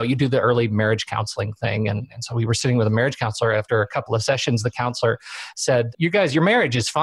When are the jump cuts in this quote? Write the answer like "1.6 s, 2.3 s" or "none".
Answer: 5.9 s